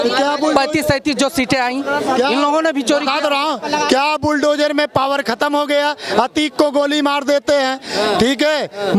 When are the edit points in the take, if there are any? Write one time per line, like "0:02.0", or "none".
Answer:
none